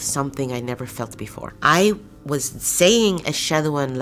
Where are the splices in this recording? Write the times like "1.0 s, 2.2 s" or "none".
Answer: none